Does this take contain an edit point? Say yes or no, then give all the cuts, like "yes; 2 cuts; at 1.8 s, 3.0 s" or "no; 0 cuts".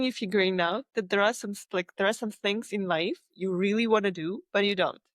no; 0 cuts